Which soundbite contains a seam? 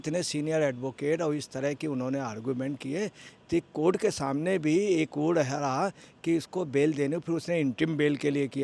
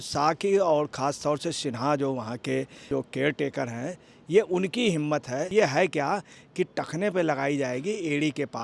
second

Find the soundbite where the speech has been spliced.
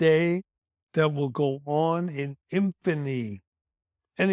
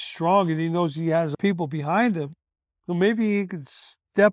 second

